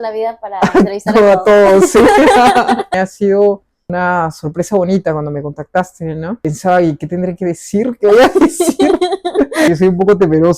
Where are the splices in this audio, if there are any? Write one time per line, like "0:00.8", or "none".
0:02.9
0:03.8
0:06.4
0:09.7